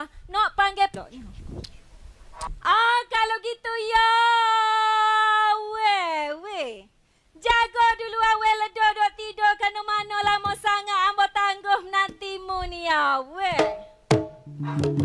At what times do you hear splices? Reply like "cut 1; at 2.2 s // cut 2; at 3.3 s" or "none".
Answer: cut 1; at 0.9 s